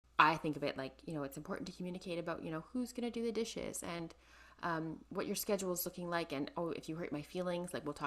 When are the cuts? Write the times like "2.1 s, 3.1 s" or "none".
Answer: none